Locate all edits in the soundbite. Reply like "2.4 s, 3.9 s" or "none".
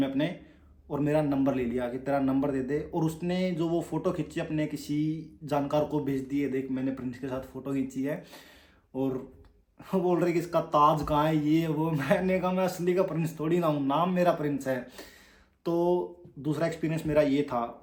none